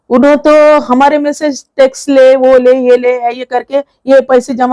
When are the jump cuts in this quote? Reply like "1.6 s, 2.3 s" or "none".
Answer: none